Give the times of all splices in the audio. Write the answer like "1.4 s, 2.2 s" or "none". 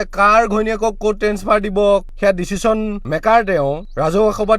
2.1 s